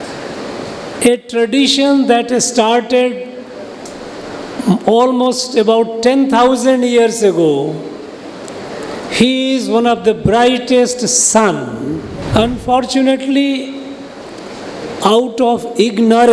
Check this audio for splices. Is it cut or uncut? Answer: cut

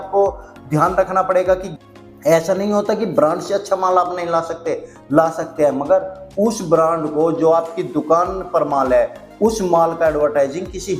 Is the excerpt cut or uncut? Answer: cut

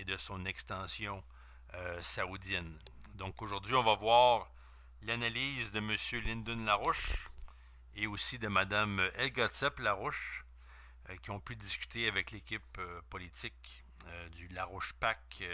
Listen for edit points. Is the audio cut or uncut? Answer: uncut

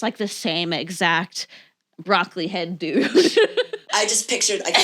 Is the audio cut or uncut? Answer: cut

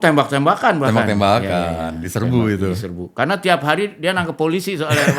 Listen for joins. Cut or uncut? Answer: uncut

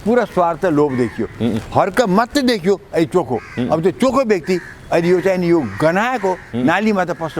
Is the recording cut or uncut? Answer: uncut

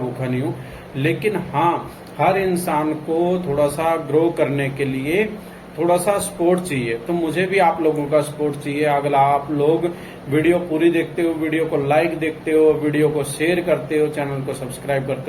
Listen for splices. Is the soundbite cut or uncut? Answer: uncut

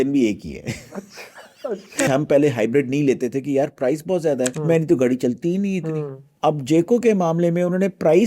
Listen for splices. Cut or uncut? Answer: cut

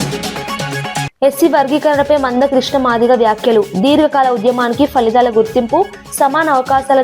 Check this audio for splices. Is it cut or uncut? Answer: cut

